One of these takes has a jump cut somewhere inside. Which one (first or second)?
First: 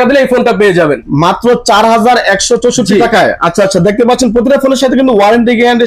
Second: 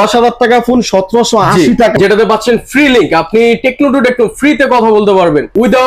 second